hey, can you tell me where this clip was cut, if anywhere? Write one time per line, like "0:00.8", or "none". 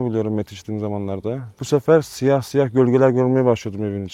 0:01.5